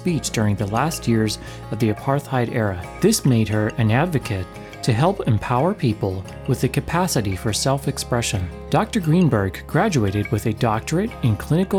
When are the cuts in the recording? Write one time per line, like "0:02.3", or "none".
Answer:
none